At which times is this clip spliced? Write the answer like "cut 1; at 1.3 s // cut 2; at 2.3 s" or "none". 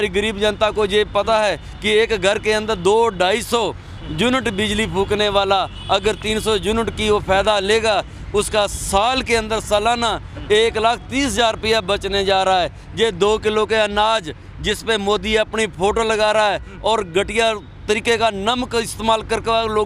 none